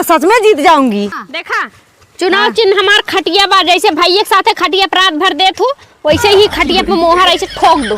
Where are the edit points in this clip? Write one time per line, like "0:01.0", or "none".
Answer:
0:01.1